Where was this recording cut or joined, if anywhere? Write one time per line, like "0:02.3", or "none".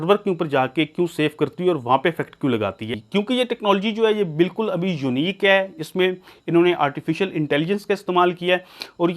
0:02.9